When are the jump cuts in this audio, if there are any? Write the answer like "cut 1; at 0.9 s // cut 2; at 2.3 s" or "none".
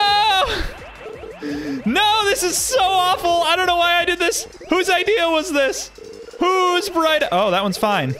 none

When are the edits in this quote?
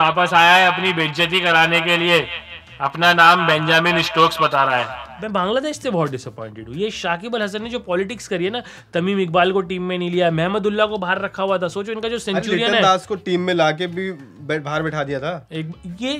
cut 1; at 5.0 s

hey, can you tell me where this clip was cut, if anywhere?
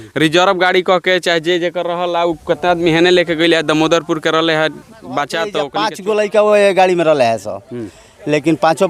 cut 1; at 5.6 s

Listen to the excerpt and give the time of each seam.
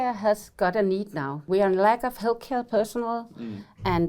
cut 1; at 1.4 s

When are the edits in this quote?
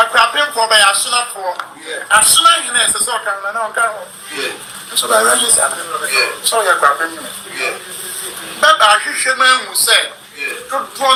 none

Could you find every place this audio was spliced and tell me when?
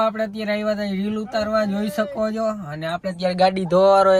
none

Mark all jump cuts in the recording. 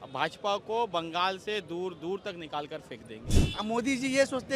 cut 1; at 3.4 s

